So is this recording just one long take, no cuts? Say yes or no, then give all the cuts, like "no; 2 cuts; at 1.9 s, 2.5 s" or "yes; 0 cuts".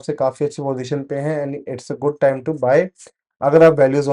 yes; 0 cuts